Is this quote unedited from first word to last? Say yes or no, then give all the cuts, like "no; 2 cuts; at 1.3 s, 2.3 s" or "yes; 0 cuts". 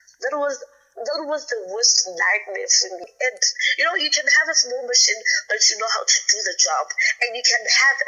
no; 1 cut; at 3.1 s